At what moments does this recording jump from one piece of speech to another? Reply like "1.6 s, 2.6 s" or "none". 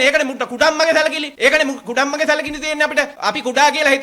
1.3 s, 3.1 s